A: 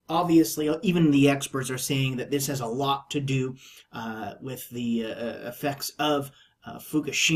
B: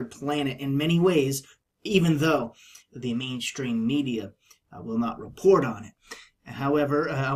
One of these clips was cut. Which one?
B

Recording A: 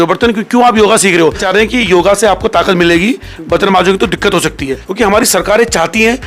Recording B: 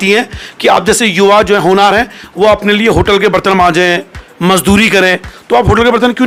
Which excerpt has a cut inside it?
A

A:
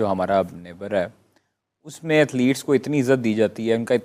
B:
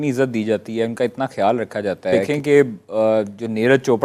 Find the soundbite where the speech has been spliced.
B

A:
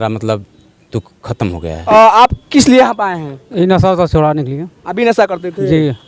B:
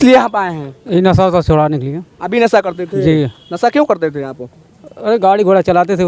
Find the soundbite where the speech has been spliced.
A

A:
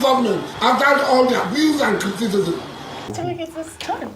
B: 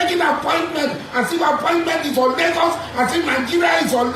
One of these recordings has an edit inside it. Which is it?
A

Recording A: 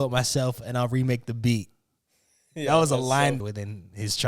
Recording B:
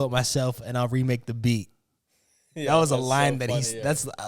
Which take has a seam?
A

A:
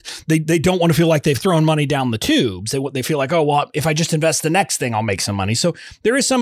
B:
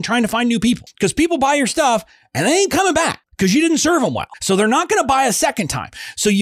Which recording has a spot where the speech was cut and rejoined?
B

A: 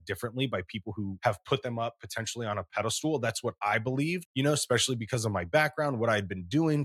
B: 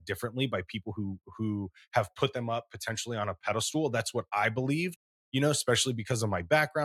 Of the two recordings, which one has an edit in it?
A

